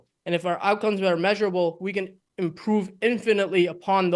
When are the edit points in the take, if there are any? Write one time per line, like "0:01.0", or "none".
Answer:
none